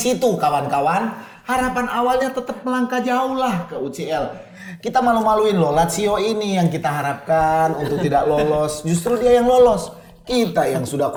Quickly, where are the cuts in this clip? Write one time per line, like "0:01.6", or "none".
none